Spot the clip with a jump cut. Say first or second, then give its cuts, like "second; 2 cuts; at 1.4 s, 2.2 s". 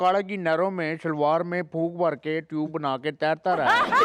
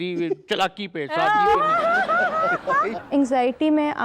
second; 1 cut; at 2.9 s